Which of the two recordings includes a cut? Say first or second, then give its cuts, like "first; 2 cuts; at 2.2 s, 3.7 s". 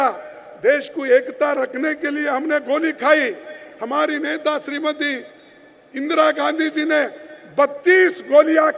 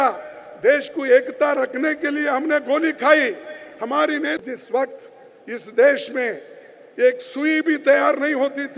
second; 1 cut; at 4.4 s